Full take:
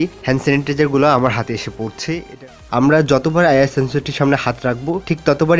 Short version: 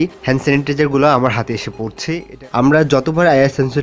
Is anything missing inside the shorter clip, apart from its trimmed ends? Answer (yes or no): yes